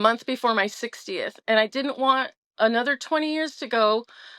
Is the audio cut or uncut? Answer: uncut